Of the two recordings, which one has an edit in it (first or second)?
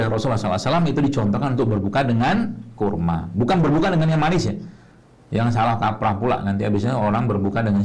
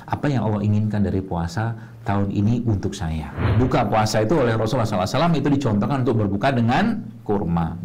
second